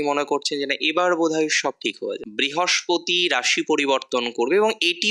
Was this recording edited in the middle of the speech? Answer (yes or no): yes